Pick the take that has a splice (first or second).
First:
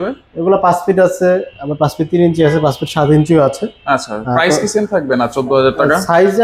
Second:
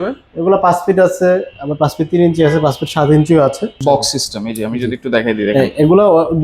second